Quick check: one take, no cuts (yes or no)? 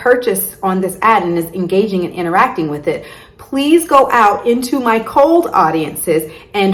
yes